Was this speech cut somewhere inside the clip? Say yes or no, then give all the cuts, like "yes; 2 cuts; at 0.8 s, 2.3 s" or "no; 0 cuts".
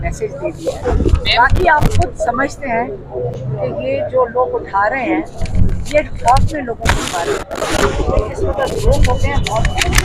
no; 0 cuts